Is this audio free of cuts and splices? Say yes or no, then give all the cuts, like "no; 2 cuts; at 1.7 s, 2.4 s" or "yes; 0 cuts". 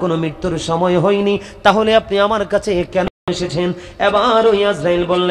yes; 0 cuts